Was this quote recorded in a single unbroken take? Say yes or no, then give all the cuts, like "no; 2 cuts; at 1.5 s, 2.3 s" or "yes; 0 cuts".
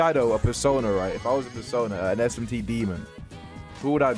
yes; 0 cuts